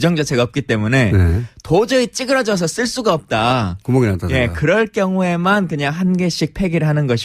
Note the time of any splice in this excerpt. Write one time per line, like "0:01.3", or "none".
0:02.5